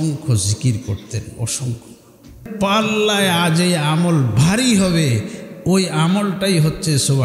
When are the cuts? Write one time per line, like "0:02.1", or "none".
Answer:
0:02.5

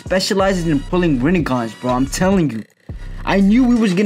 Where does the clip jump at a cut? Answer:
none

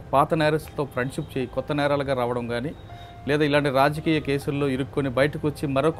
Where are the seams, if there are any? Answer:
none

